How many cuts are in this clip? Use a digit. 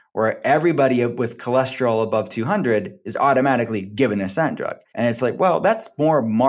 1